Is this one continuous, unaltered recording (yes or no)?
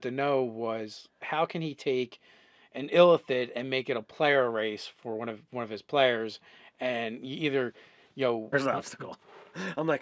yes